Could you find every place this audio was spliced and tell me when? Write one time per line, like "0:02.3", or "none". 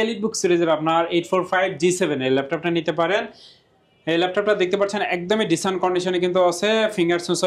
none